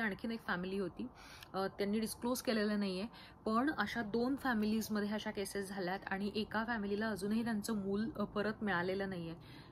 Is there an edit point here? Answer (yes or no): no